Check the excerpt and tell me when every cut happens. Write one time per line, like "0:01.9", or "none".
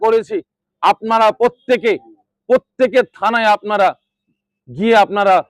none

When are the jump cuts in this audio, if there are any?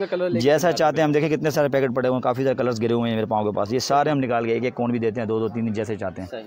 none

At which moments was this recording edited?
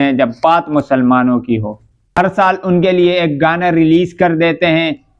0:02.1

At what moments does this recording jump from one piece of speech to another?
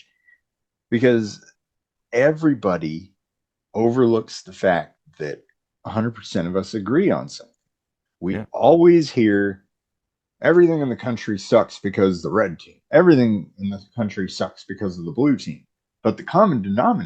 none

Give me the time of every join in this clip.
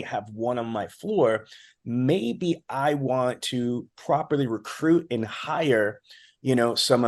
none

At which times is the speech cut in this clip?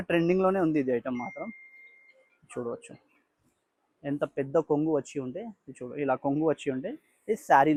none

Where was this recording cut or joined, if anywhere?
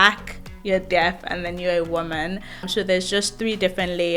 0:02.7

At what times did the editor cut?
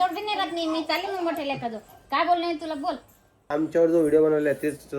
0:03.5

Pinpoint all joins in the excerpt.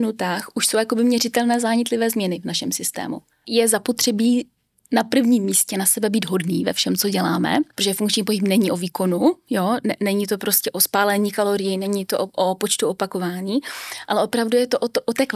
0:03.5
0:07.7

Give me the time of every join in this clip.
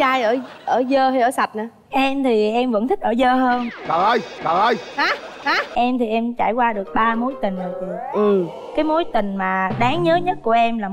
0:05.6

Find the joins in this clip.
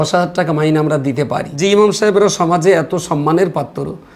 0:01.5

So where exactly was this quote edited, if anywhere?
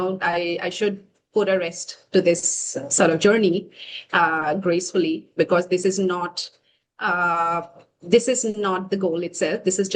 none

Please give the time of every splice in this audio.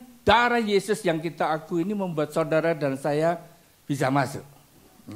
none

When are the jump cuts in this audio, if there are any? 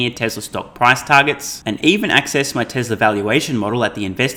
none

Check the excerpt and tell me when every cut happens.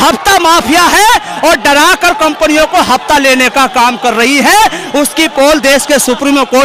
none

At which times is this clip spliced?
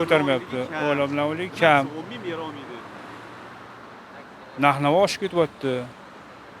none

